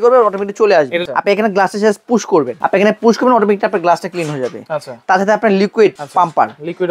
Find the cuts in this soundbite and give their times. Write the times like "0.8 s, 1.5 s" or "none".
1.0 s, 2.6 s, 6.0 s